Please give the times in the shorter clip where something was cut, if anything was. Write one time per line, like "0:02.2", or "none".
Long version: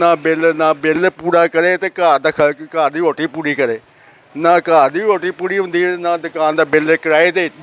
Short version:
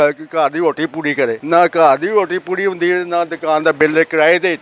0:01.4

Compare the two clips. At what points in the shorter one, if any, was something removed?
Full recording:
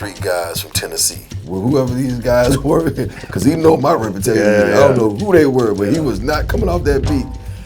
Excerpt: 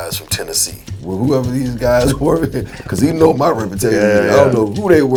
none

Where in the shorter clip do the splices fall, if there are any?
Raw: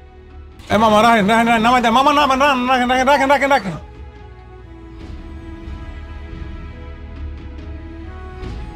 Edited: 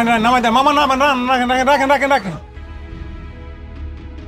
0:02.6

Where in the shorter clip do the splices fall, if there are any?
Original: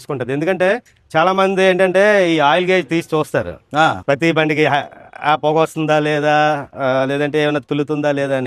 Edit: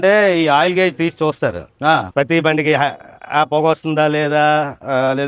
none

